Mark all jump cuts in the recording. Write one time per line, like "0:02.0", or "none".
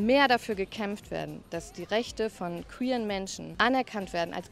0:03.4